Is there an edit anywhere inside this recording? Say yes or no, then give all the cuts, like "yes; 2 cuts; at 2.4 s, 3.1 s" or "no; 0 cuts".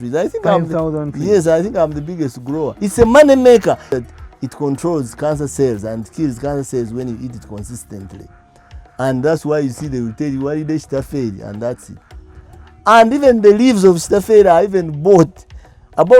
yes; 2 cuts; at 2.7 s, 3.9 s